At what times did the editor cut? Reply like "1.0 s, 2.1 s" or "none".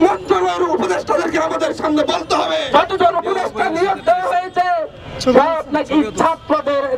2.7 s